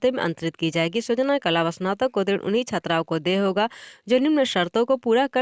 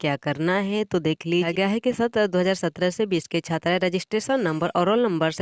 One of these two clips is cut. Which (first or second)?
second